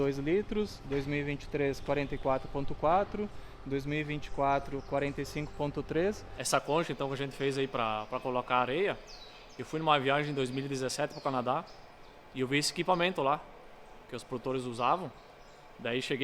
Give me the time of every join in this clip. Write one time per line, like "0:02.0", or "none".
0:06.3